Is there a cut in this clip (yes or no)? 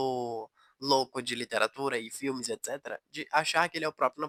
no